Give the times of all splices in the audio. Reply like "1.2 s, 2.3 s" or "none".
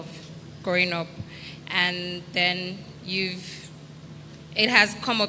none